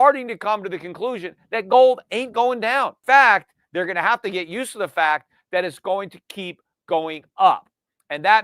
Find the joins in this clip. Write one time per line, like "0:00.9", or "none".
0:03.0